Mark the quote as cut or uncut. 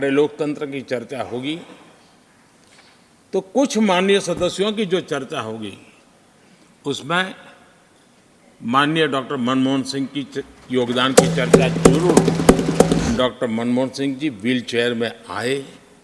cut